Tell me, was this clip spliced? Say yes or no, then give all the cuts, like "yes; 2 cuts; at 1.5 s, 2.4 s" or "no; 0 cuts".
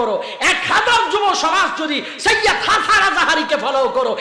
no; 0 cuts